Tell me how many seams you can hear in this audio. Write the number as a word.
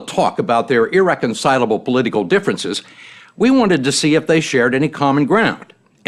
zero